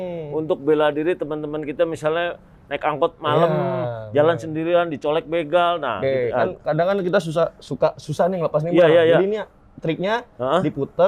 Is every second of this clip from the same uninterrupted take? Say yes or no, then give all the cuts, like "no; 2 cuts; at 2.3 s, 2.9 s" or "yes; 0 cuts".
yes; 0 cuts